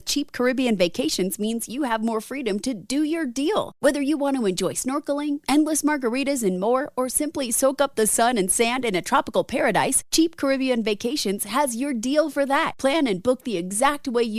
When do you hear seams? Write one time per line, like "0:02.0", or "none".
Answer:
none